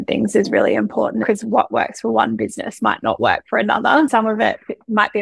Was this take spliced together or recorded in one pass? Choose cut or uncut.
cut